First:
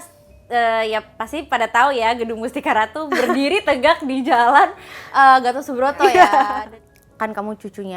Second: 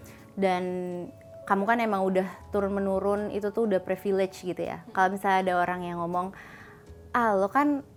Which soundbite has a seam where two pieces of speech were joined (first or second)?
first